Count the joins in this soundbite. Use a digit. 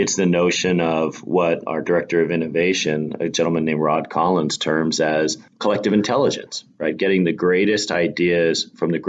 0